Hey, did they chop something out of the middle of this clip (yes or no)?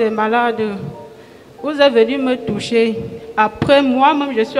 no